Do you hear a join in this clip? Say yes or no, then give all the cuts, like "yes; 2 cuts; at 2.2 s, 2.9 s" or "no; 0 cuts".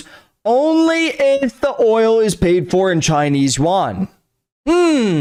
no; 0 cuts